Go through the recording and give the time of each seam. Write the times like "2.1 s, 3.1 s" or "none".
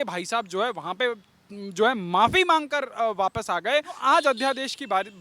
4.0 s